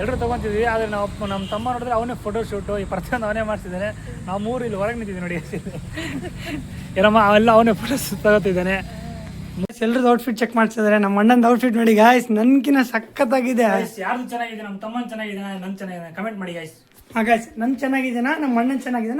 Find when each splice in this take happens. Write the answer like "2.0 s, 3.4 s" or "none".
9.7 s